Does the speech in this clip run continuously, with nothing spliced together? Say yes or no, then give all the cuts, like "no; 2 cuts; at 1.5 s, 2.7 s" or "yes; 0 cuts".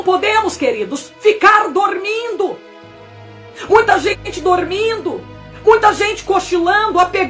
yes; 0 cuts